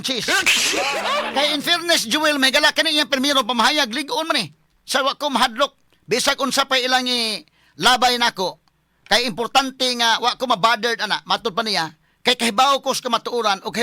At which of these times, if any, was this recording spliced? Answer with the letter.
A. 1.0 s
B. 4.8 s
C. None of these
A